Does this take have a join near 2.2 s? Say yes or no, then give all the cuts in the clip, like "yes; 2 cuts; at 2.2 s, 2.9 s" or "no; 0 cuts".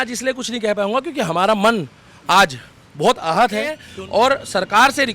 no; 1 cut; at 3.9 s